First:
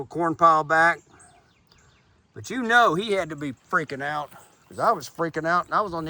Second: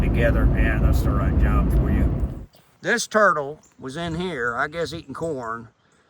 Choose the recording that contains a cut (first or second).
second